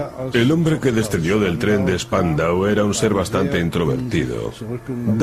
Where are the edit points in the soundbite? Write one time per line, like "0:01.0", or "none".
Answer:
none